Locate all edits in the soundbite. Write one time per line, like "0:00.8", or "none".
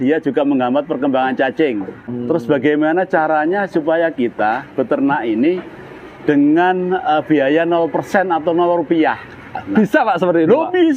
0:02.0